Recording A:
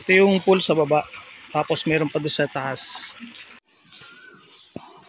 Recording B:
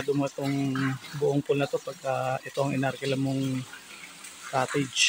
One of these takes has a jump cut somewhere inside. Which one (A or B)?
A